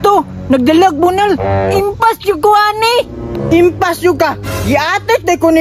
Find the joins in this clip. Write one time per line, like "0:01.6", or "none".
none